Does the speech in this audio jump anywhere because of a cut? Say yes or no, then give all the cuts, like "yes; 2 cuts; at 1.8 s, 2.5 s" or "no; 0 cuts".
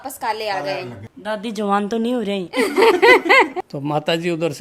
yes; 2 cuts; at 1.0 s, 3.6 s